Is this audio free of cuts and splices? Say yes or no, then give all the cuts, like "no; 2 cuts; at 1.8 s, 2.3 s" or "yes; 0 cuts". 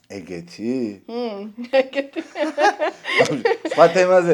no; 1 cut; at 1.7 s